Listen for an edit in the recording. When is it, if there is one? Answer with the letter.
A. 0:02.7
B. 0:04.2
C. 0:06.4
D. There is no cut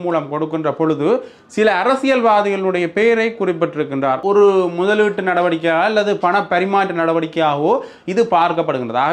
B